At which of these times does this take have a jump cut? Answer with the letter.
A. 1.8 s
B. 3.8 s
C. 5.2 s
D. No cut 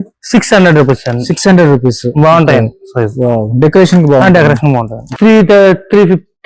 C